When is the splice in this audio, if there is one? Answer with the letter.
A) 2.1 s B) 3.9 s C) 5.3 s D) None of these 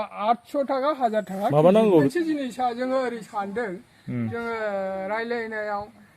A